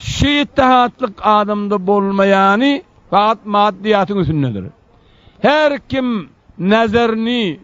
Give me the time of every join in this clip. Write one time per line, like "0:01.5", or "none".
0:01.2